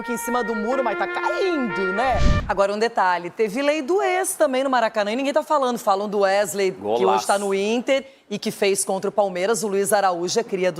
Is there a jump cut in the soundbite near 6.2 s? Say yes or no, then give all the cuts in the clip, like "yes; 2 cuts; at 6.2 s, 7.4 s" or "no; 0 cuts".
no; 1 cut; at 2.3 s